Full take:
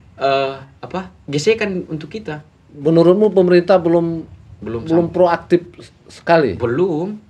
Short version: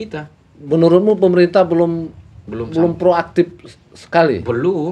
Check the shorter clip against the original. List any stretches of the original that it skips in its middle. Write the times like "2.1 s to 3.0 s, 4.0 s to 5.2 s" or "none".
none

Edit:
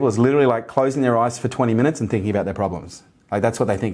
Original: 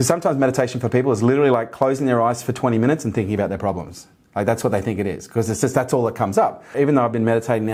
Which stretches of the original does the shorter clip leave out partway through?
none

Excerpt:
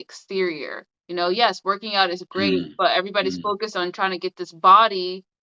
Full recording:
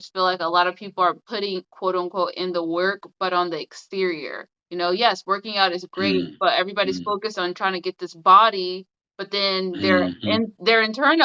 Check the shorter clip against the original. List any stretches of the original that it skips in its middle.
none

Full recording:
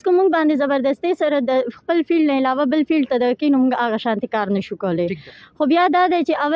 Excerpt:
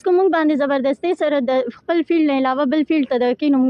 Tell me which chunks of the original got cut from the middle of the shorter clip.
none

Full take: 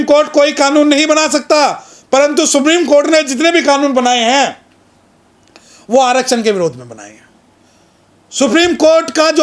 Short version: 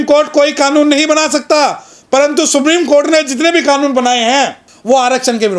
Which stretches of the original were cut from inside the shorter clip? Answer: 4.7 s to 5.7 s

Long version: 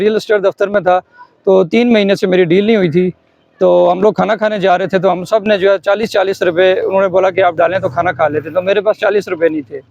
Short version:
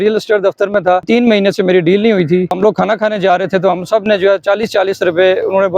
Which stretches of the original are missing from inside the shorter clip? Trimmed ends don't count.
1.0 s to 1.7 s, 3.2 s to 4.0 s

